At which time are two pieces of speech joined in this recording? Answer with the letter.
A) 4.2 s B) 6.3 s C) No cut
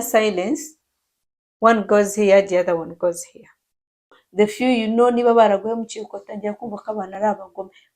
A